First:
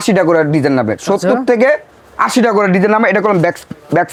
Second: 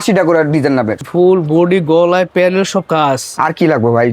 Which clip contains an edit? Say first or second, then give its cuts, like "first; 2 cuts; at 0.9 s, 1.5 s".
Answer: second; 1 cut; at 1.0 s